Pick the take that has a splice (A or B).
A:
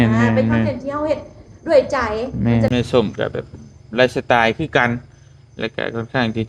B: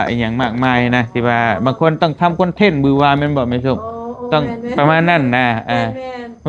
A